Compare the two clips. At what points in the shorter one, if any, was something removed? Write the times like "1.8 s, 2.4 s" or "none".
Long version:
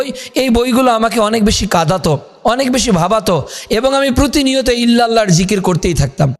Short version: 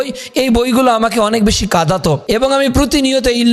2.2 s